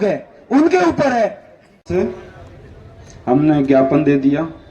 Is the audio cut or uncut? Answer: cut